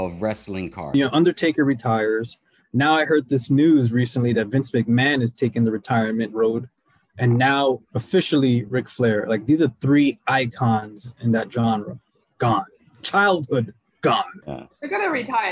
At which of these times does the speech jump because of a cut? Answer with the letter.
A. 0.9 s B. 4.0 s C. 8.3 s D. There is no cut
A